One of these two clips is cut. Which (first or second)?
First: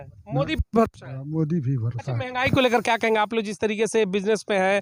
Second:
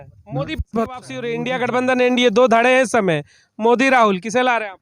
second